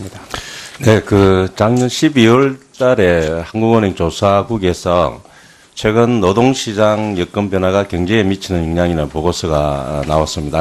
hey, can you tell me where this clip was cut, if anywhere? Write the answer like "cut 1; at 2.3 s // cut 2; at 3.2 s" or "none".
cut 1; at 4.1 s